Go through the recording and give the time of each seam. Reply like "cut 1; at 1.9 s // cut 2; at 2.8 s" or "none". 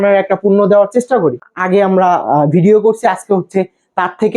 cut 1; at 1.5 s

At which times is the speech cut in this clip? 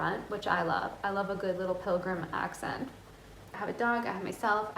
cut 1; at 3.5 s

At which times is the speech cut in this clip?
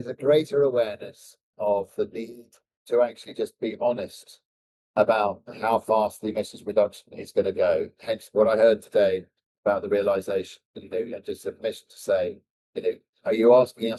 none

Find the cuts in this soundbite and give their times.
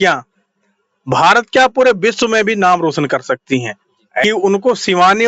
cut 1; at 4.2 s

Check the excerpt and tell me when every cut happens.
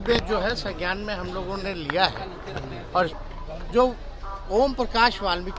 cut 1; at 3.1 s

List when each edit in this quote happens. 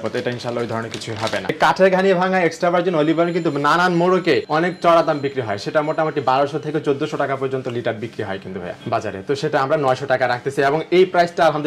cut 1; at 1.5 s

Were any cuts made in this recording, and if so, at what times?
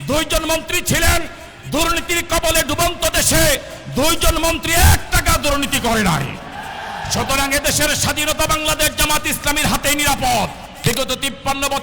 cut 1; at 10.7 s

